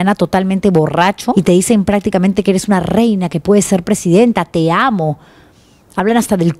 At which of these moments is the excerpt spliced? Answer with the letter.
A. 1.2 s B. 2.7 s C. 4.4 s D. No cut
A